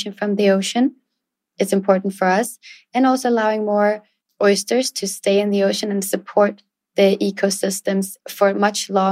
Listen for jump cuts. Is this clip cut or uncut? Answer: cut